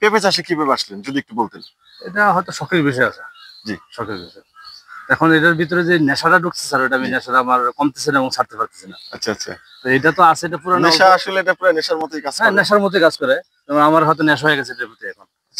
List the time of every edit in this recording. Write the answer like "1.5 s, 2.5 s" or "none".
none